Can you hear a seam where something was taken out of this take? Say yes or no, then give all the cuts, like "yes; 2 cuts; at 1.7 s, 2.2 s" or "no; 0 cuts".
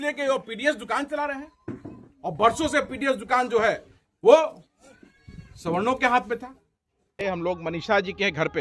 yes; 1 cut; at 7.2 s